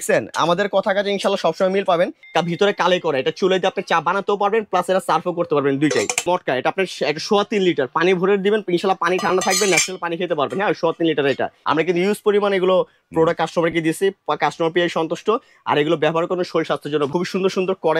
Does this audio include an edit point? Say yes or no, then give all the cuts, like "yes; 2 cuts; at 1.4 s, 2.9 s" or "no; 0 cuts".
yes; 4 cuts; at 2.2 s, 6.2 s, 11.5 s, 17.1 s